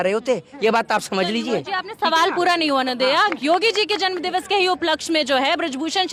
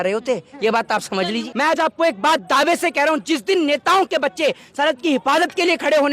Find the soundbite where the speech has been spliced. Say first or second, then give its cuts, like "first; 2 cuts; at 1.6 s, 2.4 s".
second; 1 cut; at 1.4 s